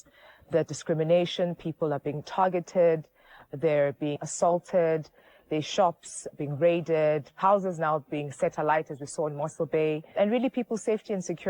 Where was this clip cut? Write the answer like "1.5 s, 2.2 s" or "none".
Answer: none